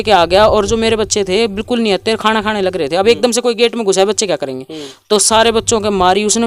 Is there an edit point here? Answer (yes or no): no